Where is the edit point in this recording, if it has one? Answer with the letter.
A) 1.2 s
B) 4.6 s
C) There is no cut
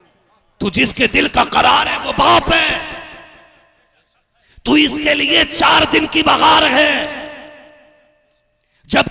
C